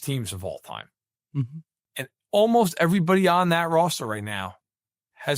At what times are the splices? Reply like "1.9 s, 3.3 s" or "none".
1.8 s